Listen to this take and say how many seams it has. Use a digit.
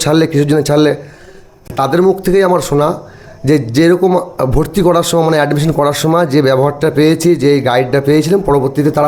0